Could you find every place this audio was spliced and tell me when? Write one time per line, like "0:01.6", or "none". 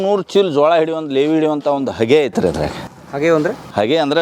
none